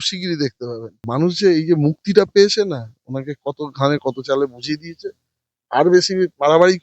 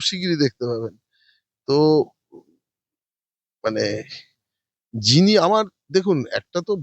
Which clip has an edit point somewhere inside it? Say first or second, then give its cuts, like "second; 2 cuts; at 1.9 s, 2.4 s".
first; 1 cut; at 1.0 s